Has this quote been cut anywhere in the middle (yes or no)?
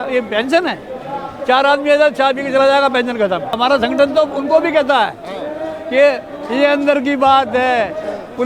yes